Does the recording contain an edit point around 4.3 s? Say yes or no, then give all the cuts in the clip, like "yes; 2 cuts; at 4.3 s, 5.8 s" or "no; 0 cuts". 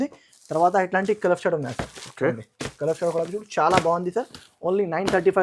no; 0 cuts